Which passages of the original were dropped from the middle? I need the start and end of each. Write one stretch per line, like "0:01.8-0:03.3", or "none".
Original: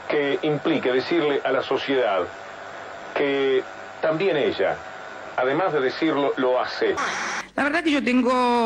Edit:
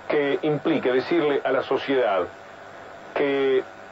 none